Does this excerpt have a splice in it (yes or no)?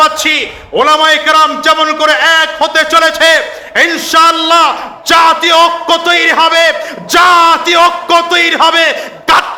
no